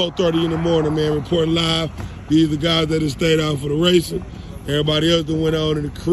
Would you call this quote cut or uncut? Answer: uncut